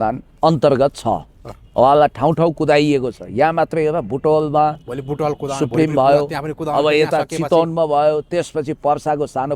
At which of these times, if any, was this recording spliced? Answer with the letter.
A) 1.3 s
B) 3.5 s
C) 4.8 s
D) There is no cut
D